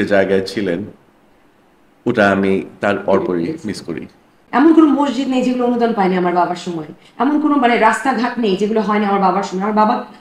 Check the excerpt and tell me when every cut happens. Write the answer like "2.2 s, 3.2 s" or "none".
4.4 s